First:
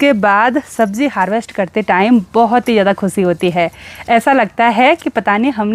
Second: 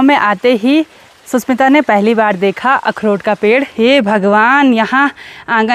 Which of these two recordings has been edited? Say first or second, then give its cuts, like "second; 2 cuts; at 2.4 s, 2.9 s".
second; 1 cut; at 3.7 s